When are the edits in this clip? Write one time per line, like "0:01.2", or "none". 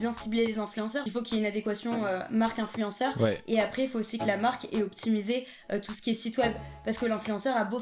0:01.1